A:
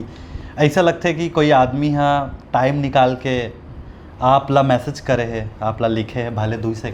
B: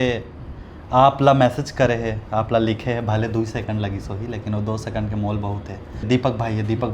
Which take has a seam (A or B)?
B